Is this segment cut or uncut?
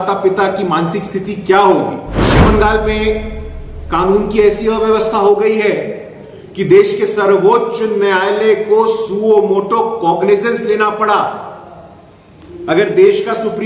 cut